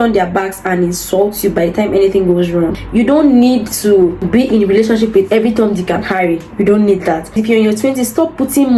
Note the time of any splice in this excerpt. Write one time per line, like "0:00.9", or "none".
0:02.8
0:04.2
0:07.3